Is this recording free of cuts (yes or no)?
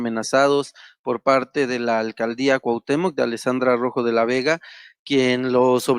yes